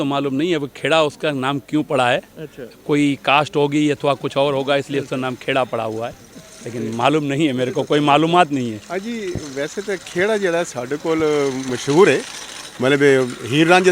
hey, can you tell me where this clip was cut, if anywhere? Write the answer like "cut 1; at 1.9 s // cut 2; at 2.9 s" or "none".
none